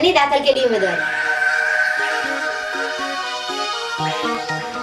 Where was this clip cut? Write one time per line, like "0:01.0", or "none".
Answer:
0:01.0